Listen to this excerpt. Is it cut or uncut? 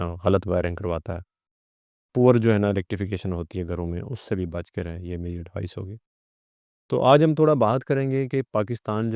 uncut